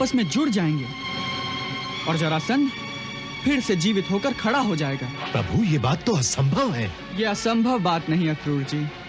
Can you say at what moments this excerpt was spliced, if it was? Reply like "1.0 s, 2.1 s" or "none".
5.2 s, 7.0 s